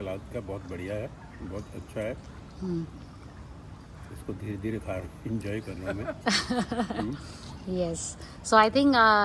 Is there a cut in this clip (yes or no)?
no